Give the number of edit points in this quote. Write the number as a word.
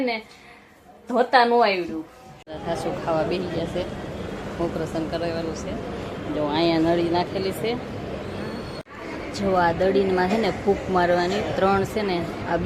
two